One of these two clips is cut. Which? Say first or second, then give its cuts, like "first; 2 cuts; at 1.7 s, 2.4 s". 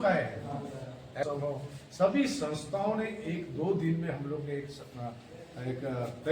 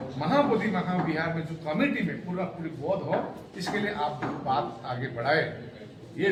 first; 1 cut; at 1.2 s